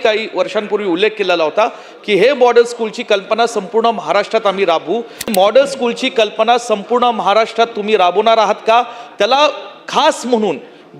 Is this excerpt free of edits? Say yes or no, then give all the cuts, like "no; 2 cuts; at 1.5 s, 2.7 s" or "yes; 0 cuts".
no; 1 cut; at 5.2 s